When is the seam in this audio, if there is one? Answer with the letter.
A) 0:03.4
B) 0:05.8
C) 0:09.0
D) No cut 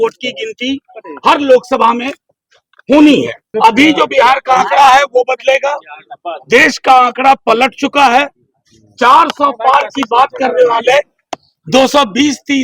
A